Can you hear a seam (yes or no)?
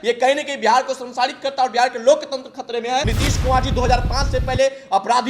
yes